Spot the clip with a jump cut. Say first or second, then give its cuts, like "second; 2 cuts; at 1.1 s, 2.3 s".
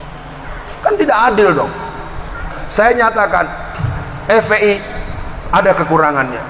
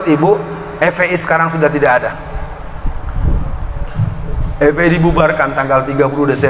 first; 1 cut; at 2.5 s